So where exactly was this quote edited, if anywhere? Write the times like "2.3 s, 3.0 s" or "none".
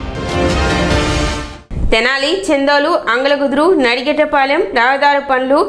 1.5 s